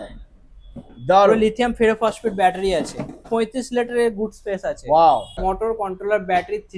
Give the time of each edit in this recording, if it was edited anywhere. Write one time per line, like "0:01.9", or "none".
0:03.3
0:05.4